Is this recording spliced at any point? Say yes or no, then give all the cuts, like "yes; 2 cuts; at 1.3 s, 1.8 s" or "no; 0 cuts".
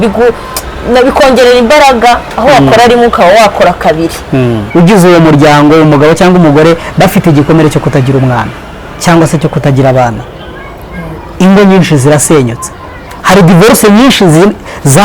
yes; 1 cut; at 4.6 s